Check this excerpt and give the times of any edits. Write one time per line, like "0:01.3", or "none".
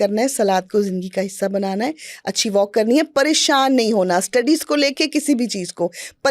none